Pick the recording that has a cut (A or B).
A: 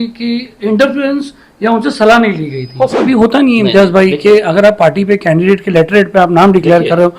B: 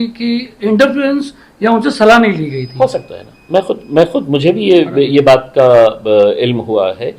A